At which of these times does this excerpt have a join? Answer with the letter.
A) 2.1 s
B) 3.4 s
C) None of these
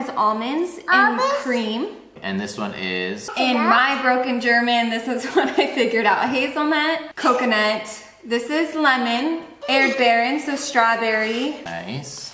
A